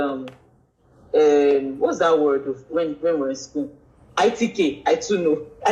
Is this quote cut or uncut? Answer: uncut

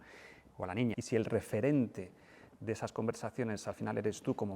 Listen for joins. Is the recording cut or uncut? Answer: cut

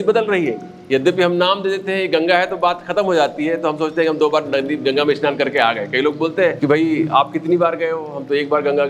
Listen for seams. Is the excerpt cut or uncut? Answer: cut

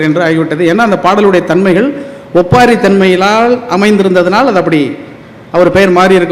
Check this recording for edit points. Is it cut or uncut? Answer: uncut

